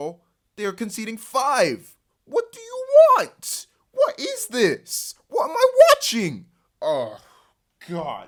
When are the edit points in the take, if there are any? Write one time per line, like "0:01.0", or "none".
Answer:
none